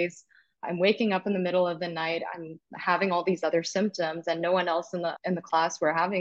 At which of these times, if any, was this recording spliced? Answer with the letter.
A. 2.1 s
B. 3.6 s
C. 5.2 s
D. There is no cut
C